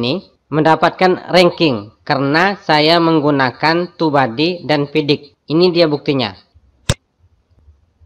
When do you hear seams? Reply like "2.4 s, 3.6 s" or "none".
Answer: 1.9 s